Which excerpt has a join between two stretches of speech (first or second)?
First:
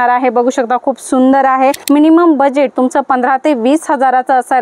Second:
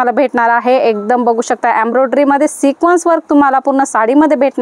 first